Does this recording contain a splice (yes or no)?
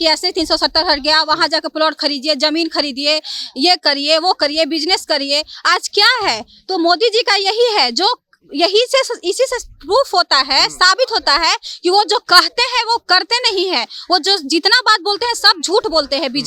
no